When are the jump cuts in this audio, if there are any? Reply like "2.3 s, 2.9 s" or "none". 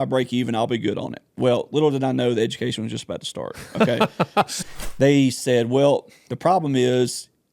4.5 s